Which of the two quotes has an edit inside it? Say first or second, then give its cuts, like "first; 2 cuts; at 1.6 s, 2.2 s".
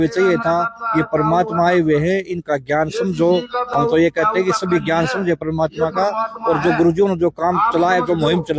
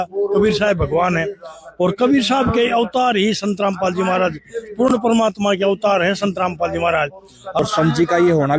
second; 1 cut; at 7.6 s